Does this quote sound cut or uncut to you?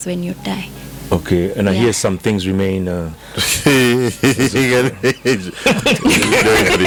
uncut